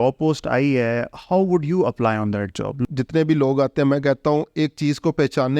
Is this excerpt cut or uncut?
cut